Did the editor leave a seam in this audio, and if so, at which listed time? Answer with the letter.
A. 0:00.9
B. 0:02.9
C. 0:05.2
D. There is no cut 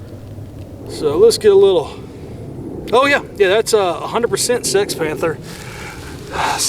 A